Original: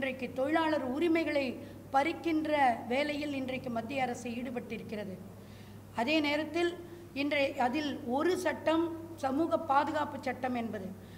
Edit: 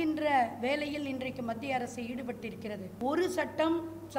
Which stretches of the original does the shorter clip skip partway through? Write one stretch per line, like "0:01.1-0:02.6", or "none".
0:05.2-0:08.0